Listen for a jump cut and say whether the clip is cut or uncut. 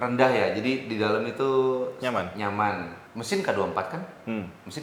uncut